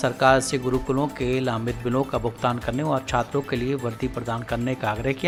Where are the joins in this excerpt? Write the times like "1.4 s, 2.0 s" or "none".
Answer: none